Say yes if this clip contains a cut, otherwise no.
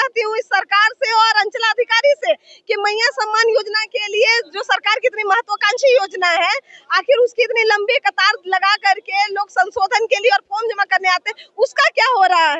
no